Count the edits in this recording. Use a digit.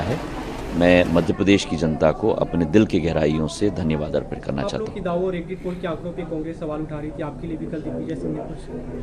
0